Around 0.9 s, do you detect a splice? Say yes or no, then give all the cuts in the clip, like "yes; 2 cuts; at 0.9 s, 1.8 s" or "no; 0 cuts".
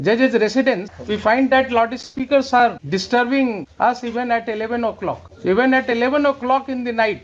yes; 4 cuts; at 0.9 s, 2.8 s, 3.7 s, 5.3 s